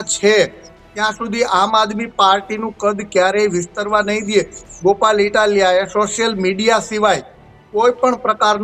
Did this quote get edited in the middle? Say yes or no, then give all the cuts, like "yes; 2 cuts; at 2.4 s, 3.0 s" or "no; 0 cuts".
yes; 1 cut; at 4.6 s